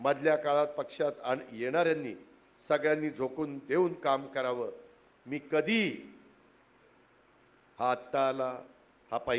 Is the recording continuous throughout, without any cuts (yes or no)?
yes